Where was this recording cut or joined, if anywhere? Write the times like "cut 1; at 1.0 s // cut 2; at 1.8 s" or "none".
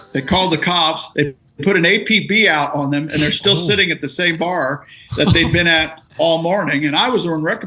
cut 1; at 1.0 s